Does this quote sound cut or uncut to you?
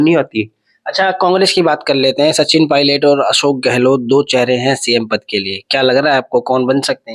uncut